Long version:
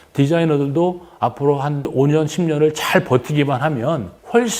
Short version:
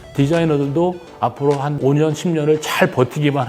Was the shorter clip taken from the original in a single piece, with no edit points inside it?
no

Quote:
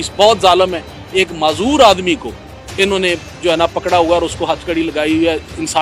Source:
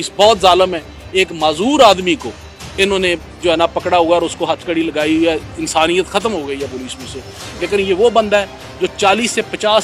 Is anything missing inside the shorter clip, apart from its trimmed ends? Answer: no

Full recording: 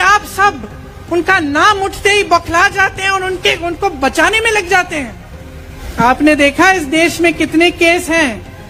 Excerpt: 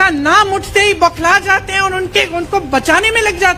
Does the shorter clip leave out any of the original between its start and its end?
no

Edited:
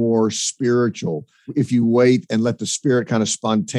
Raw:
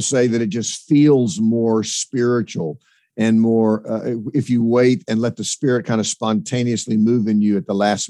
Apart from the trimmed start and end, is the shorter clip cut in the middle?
yes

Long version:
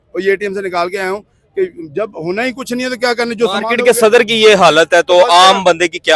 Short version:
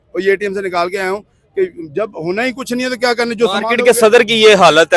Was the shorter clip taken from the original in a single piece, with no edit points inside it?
yes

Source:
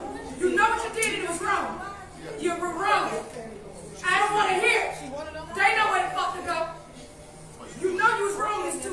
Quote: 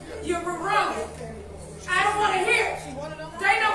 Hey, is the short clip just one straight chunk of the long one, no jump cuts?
yes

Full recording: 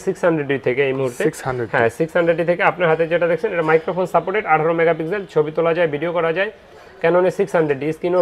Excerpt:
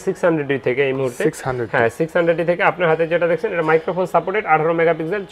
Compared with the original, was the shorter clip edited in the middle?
no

